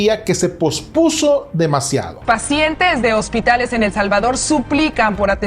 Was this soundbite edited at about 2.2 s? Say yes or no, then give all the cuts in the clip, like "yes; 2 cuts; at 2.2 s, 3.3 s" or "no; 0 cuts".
yes; 1 cut; at 2.2 s